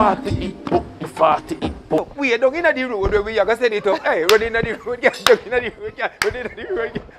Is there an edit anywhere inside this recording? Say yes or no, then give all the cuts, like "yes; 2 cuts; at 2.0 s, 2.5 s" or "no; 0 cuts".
yes; 1 cut; at 2.0 s